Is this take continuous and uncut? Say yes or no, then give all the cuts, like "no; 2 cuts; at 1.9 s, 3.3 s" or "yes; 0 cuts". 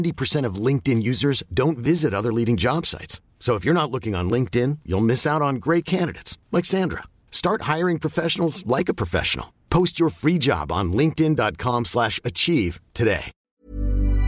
no; 1 cut; at 13.3 s